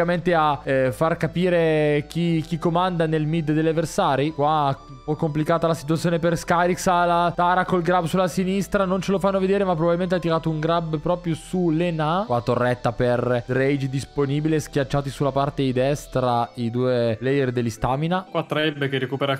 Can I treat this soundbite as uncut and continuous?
yes; 0 cuts

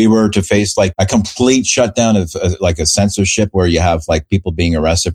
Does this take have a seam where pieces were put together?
yes; 1 cut; at 0.9 s

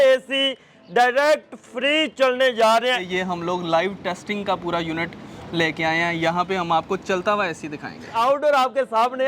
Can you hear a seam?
yes; 2 cuts; at 3.0 s, 8.1 s

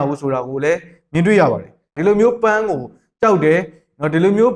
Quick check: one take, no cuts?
no; 1 cut; at 1.9 s

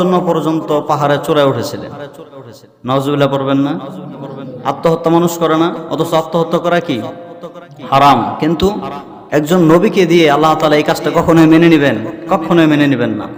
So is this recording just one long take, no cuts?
yes; 0 cuts

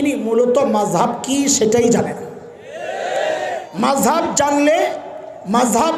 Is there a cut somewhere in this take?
no; 0 cuts

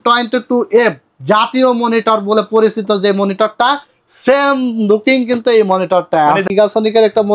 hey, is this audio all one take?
no; 1 cut; at 6.5 s

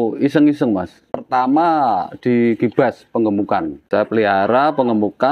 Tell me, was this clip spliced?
yes; 2 cuts; at 1.0 s, 3.8 s

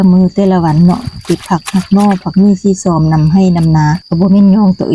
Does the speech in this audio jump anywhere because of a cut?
yes; 1 cut; at 4.0 s

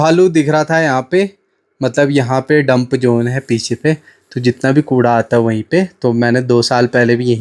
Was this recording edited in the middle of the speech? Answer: no; 0 cuts

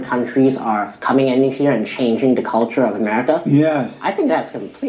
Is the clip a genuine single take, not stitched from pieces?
yes; 0 cuts

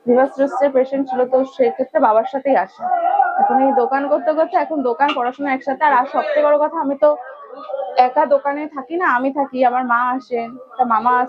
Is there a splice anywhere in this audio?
no; 0 cuts

